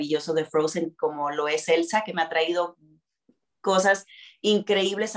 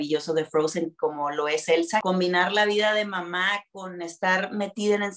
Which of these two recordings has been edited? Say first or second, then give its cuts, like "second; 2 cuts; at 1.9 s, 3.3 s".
second; 1 cut; at 2.0 s